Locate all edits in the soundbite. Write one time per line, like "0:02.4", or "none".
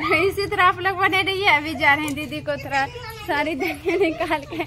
none